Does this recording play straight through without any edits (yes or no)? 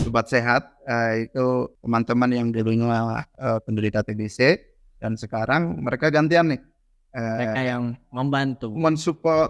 no